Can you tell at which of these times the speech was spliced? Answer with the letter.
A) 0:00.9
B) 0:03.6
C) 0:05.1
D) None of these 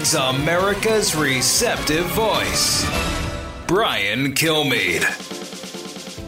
C